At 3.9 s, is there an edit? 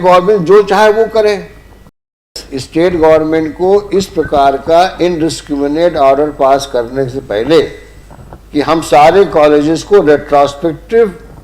no; 1 cut; at 2.3 s

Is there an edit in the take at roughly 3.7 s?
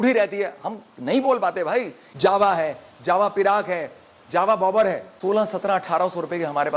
no; 2 cuts; at 2.0 s, 5.1 s

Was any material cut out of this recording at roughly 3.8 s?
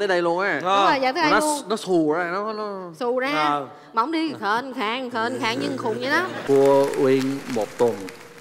no; 1 cut; at 6.4 s

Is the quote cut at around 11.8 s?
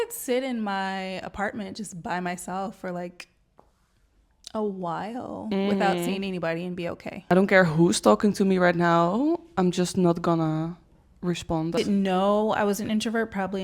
yes; 2 cuts; at 7.3 s, 11.8 s

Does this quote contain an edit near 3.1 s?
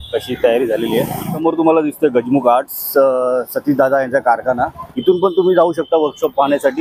no; 2 cuts; at 1.2 s, 4.9 s

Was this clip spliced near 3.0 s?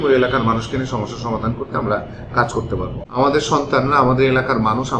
yes; 1 cut; at 3.0 s

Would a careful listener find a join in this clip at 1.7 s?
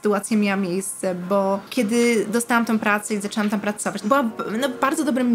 yes; 2 cuts; at 1.7 s, 4.0 s

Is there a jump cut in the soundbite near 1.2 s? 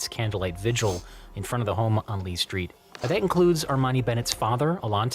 no; 1 cut; at 2.8 s

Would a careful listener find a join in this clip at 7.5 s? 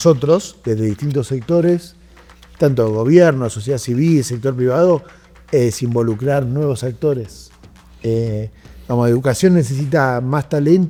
no; 0 cuts

